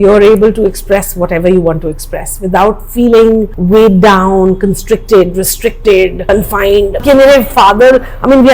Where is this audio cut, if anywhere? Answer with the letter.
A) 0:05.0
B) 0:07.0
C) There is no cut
B